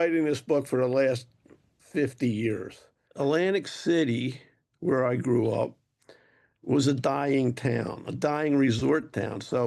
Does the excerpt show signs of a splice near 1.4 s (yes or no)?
no